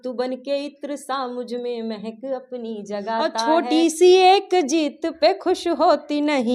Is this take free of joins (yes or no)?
no